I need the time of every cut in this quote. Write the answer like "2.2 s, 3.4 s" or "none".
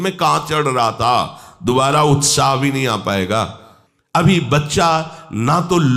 4.2 s